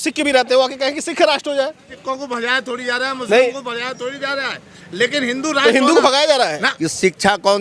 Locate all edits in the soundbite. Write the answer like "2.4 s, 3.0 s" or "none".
1.9 s, 6.7 s